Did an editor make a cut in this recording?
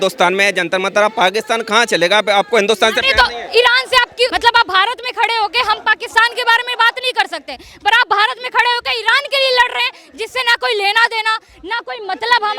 yes; 1 cut; at 4.3 s

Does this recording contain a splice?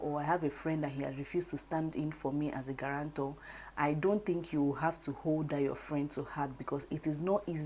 no; 0 cuts

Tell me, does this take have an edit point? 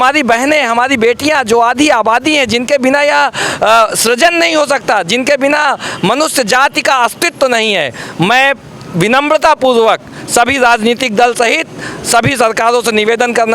no; 0 cuts

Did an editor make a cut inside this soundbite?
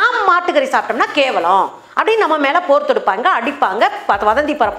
no; 0 cuts

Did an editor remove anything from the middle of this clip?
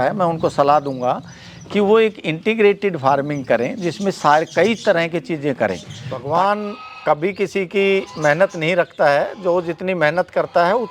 yes; 1 cut; at 6.2 s

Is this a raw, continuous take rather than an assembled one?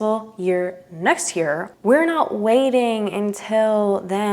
no; 1 cut; at 1.9 s

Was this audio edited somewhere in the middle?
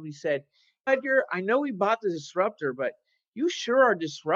no; 0 cuts

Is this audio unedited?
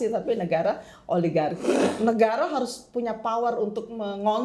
no; 1 cut; at 1.7 s

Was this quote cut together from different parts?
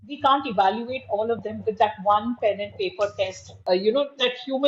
yes; 1 cut; at 3.5 s

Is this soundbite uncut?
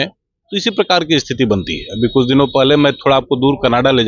yes; 0 cuts

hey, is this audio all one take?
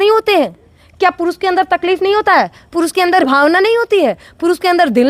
yes; 0 cuts

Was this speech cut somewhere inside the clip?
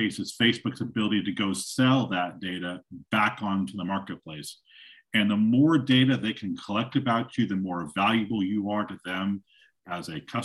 no; 0 cuts

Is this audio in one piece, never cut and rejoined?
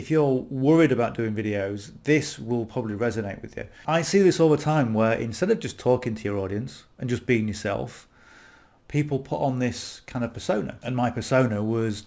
no; 2 cuts; at 3.8 s, 10.8 s

